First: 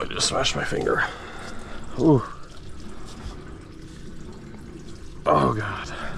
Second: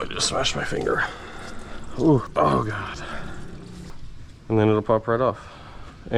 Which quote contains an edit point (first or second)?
second